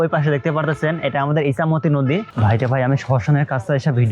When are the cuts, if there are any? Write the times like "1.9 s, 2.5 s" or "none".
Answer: 2.3 s